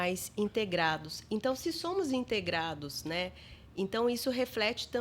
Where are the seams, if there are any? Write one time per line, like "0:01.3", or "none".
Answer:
none